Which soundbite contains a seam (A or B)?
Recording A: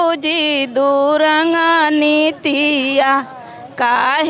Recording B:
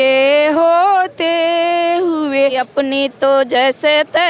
B